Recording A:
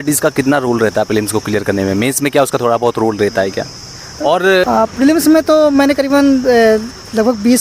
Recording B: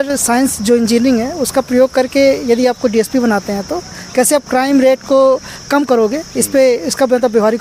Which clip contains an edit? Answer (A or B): A